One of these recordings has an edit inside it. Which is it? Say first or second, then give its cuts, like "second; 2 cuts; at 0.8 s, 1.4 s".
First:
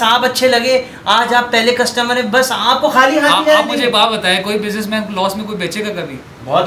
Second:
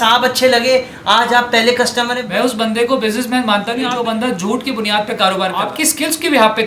second; 3 cuts; at 2.2 s, 3.9 s, 5.7 s